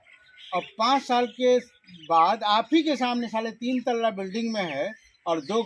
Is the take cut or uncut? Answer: uncut